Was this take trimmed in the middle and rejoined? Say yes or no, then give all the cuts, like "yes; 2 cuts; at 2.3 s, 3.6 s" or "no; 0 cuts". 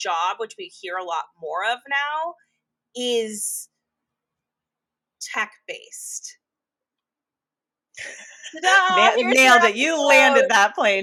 no; 0 cuts